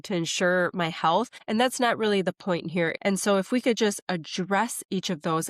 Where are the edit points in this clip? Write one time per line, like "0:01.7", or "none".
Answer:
0:01.4
0:02.9

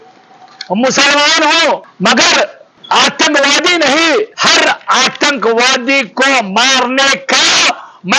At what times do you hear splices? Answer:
0:01.9
0:02.7
0:04.3

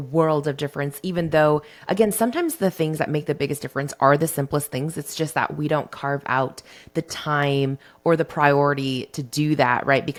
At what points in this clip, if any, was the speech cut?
none

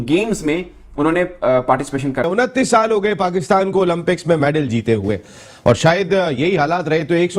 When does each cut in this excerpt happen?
0:02.3

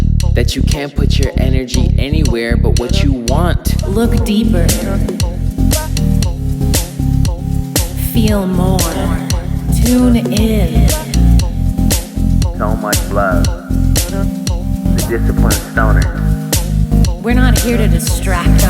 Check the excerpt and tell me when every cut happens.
0:03.8
0:09.7
0:15.0

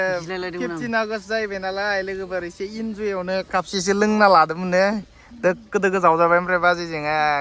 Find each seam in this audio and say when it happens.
none

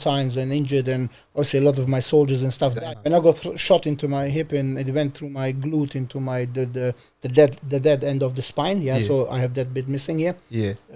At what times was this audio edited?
0:02.7

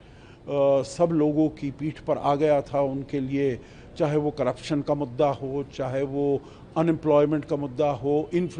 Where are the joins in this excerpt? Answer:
none

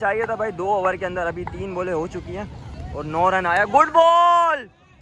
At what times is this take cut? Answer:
none

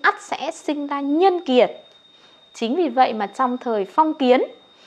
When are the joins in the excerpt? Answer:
none

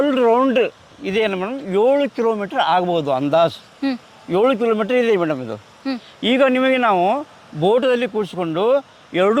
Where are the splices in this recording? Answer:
none

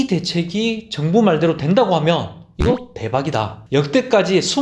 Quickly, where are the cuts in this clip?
0:03.6

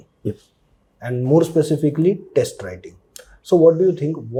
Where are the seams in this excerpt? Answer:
none

